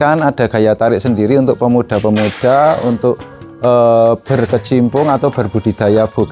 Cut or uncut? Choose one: uncut